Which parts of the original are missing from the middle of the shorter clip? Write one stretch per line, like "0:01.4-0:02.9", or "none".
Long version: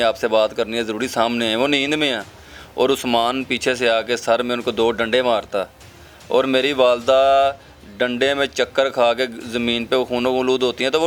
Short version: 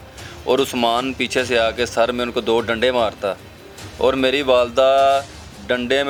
none